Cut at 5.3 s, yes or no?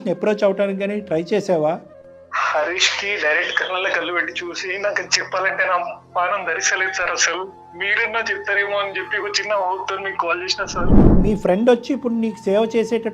no